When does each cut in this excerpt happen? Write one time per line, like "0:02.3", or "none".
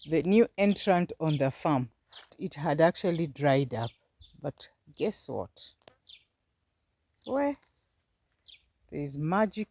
0:02.5